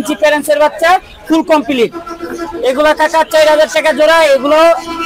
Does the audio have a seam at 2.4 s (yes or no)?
no